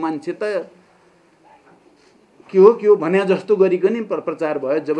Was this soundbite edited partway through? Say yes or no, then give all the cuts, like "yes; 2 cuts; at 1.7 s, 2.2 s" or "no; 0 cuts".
no; 0 cuts